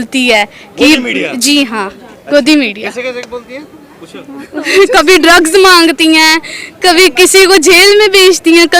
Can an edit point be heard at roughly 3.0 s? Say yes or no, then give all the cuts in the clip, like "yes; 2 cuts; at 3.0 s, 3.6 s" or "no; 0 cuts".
no; 0 cuts